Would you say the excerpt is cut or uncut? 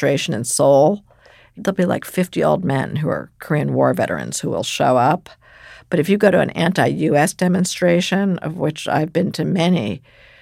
cut